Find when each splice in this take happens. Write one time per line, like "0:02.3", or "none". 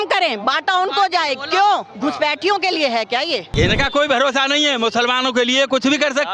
0:03.5